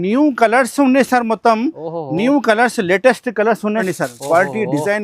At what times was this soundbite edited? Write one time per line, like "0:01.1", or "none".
0:03.8